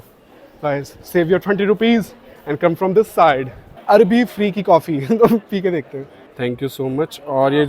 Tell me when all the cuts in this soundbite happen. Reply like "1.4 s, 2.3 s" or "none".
3.7 s, 6.2 s